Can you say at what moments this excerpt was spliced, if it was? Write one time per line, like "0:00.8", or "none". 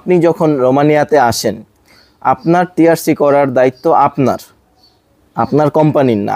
none